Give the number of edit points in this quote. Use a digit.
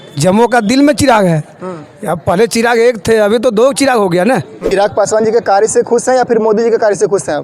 1